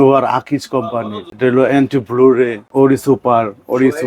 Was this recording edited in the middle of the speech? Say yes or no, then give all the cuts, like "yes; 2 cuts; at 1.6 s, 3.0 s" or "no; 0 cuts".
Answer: yes; 2 cuts; at 1.2 s, 2.6 s